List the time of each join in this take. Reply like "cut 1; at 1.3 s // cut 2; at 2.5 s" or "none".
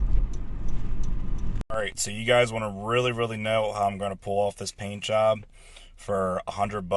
cut 1; at 1.7 s